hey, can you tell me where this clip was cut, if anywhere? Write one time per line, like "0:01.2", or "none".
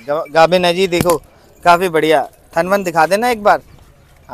none

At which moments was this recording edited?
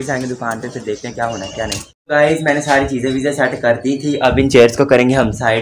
0:01.9

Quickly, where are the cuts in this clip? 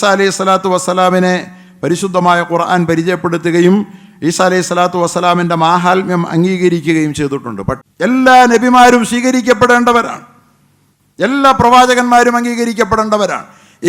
0:07.8

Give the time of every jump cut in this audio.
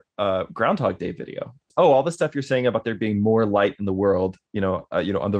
0:01.7

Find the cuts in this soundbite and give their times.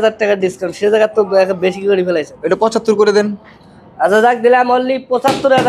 0:02.3

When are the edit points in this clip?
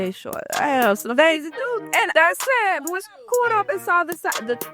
0:01.5

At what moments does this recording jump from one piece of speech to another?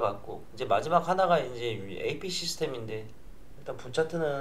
0:03.1

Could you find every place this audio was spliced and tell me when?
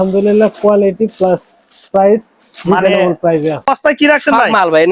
0:03.7

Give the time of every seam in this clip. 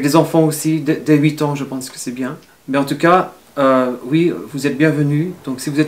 0:02.5

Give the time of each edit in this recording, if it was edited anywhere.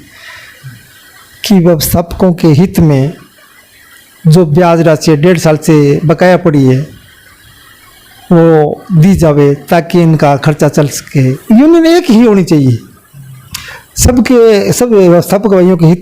0:11.4

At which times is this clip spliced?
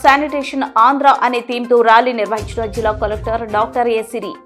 none

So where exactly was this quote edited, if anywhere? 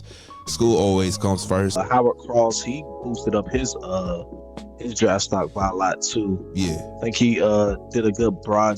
0:01.7

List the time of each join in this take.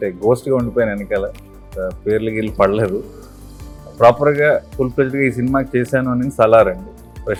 none

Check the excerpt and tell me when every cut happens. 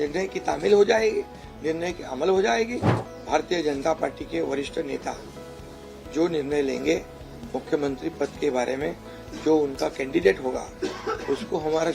0:02.9

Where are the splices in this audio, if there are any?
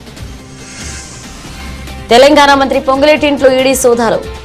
0:01.7

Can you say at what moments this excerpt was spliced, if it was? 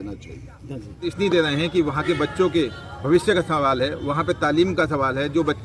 0:01.1

